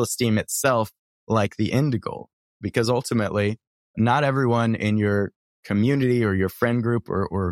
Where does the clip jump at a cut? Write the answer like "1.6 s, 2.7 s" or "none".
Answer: 2.6 s, 3.9 s